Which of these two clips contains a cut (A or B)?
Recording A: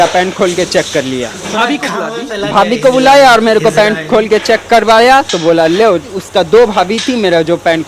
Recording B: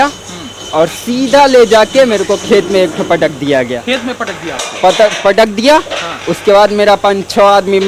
A